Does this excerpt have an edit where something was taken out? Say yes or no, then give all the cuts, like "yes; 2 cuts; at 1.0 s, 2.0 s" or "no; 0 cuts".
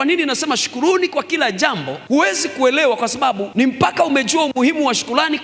yes; 2 cuts; at 1.9 s, 3.4 s